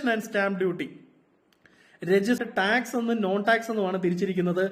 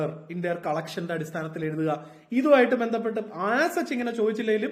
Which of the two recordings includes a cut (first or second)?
first